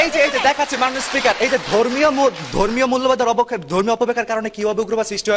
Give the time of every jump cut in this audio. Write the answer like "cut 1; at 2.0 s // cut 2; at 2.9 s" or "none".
none